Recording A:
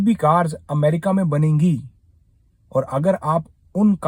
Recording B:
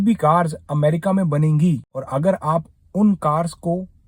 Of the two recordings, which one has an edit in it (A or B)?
B